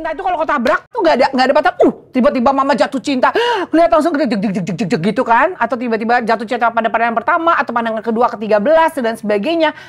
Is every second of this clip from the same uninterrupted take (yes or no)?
no